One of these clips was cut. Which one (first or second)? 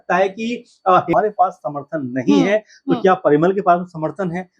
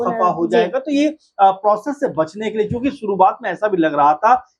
first